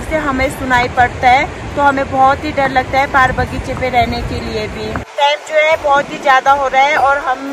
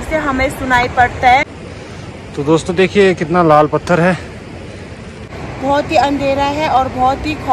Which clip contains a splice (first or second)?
second